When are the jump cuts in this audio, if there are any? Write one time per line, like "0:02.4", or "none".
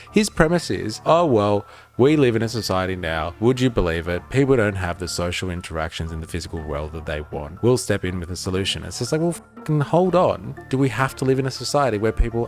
0:01.0
0:03.3
0:07.5